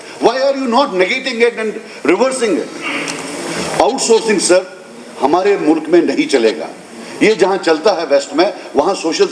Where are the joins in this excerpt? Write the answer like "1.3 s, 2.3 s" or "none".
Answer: none